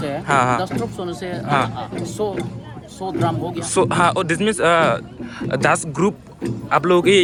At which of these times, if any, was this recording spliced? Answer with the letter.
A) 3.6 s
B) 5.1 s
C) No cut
C